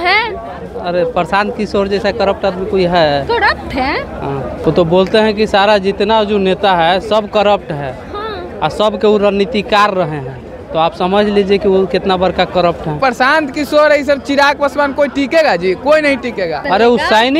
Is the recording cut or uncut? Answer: cut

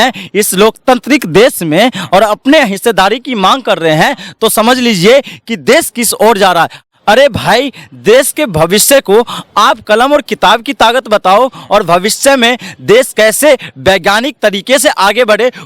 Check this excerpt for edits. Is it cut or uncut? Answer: cut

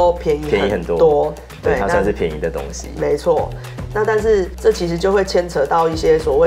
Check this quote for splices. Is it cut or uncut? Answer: uncut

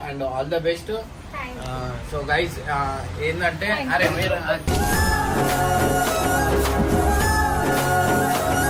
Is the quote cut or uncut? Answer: uncut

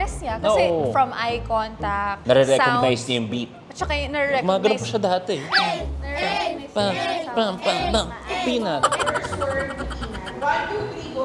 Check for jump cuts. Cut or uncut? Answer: cut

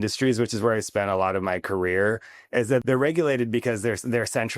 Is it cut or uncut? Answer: cut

